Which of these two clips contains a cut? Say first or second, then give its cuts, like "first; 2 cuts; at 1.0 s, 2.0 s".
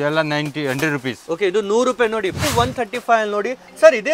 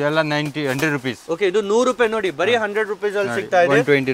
first; 1 cut; at 2.4 s